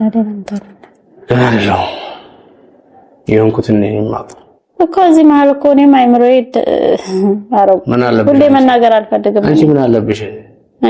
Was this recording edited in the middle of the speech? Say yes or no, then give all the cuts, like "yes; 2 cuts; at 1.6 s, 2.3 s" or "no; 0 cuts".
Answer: no; 0 cuts